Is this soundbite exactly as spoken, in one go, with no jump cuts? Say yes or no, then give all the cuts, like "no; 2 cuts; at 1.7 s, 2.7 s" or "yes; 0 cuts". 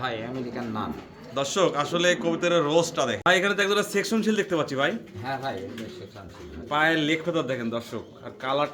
no; 1 cut; at 3.2 s